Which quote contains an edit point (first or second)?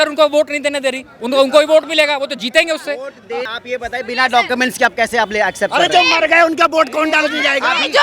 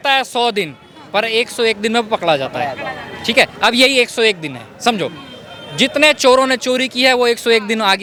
first